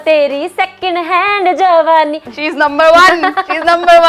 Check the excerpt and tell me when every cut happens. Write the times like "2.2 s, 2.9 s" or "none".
2.2 s